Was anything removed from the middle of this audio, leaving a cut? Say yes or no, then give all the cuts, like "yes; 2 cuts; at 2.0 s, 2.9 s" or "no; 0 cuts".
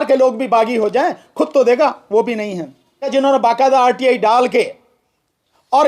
yes; 1 cut; at 3.1 s